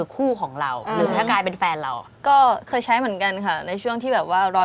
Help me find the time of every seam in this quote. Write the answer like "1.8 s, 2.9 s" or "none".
none